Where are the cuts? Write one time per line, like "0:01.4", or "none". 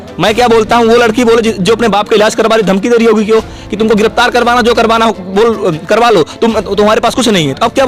none